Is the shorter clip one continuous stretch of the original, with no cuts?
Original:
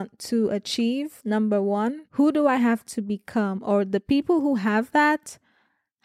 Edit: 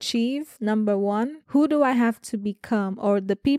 yes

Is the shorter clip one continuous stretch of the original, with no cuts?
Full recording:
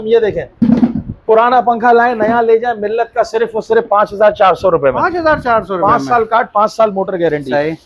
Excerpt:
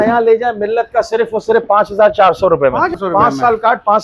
no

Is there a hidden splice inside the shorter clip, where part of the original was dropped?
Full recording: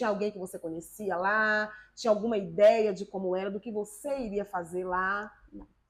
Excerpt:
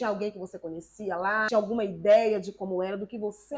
yes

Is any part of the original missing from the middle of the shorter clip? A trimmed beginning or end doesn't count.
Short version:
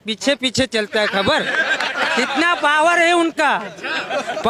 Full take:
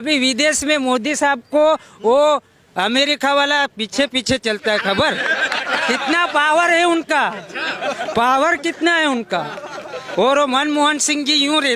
no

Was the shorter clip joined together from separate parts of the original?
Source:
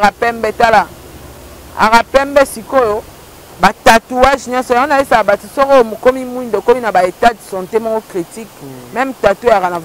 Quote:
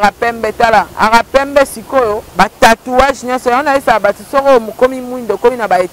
yes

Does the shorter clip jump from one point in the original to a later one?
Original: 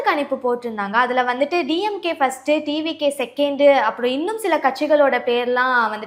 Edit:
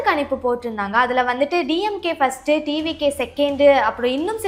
no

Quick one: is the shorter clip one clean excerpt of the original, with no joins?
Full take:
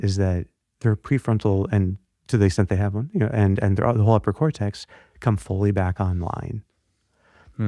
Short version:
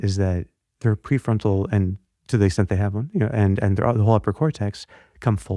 yes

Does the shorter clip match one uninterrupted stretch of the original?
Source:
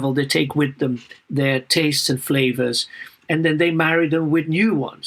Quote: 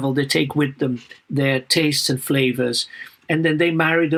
yes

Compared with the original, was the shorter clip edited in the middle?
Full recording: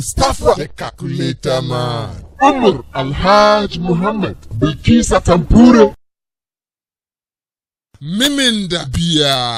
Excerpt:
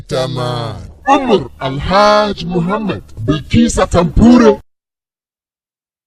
no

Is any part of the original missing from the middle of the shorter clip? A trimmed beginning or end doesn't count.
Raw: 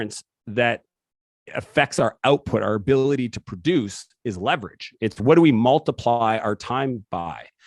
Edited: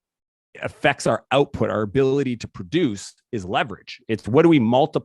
no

